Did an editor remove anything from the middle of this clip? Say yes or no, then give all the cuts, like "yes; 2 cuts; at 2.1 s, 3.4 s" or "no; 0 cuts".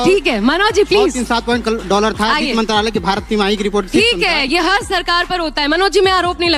no; 0 cuts